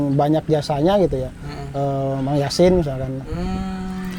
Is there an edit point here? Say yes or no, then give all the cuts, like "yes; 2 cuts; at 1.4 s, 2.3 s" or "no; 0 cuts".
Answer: no; 0 cuts